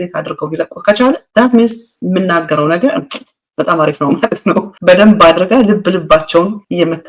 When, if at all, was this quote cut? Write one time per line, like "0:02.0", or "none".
none